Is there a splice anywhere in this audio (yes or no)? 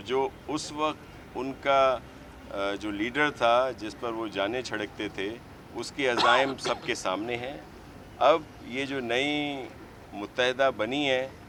no